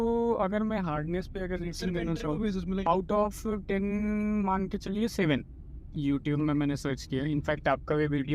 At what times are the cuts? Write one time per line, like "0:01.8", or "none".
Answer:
0:02.8
0:05.9